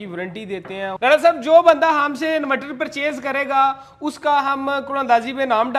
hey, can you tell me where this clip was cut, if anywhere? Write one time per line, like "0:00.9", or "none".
0:00.9